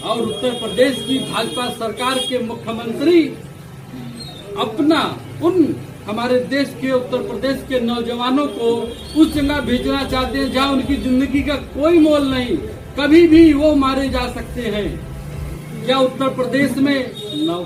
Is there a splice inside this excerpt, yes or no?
no